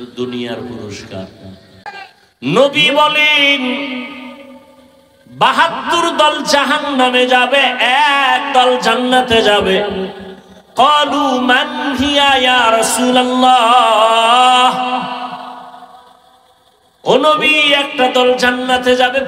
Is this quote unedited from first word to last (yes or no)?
no